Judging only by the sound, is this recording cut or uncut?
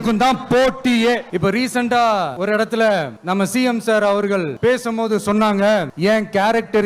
cut